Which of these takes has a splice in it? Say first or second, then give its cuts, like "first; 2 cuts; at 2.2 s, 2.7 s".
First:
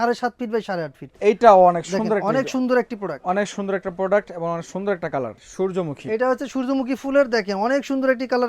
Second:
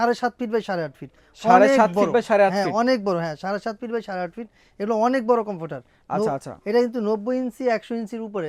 first; 2 cuts; at 1.2 s, 5.4 s